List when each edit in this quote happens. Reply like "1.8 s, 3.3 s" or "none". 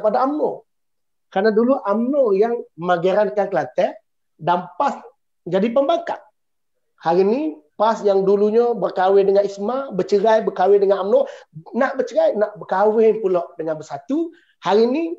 none